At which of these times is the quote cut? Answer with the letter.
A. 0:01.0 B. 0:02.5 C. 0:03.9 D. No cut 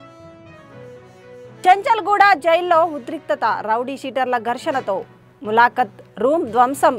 A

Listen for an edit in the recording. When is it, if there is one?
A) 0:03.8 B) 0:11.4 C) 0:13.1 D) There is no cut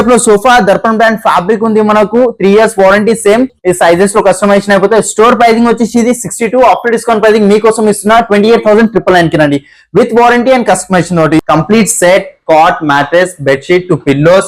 B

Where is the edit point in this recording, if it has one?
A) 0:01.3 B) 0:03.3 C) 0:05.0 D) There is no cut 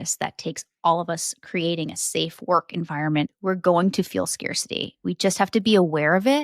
B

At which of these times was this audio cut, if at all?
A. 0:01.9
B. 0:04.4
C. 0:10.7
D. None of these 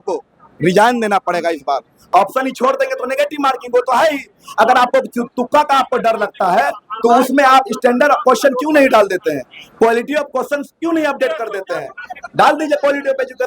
A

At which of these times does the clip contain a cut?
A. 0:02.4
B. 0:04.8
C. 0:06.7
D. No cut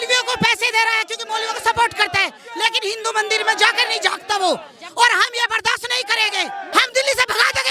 C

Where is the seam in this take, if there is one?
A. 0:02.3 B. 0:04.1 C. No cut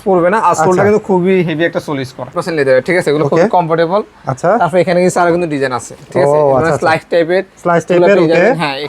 A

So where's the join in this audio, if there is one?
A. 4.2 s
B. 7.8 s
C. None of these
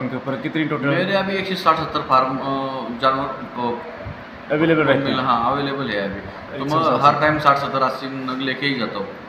C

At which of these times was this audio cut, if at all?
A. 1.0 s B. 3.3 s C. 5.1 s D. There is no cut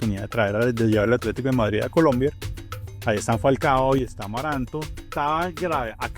C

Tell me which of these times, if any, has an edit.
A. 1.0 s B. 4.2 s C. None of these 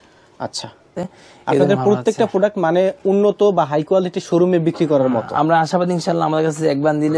A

